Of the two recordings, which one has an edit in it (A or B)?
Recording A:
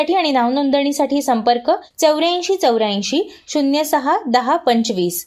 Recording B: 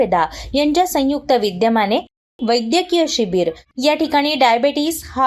B